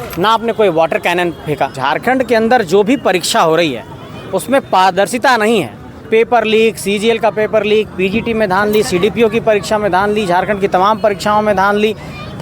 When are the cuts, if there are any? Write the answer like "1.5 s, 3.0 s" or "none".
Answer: 1.8 s, 6.0 s